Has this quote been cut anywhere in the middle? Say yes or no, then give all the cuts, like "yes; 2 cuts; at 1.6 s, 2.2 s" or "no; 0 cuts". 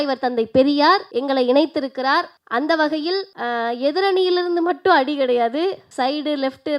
yes; 4 cuts; at 1.1 s, 2.4 s, 3.3 s, 5.8 s